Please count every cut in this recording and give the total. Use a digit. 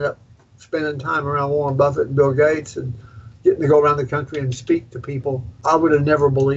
1